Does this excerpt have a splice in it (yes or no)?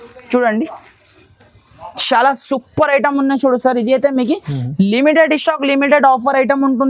no